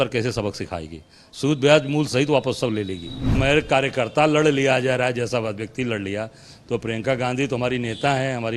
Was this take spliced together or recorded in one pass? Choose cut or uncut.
cut